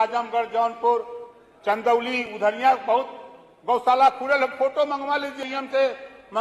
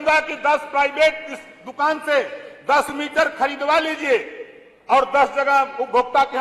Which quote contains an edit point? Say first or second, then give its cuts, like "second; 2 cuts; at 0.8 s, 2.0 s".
first; 1 cut; at 5.4 s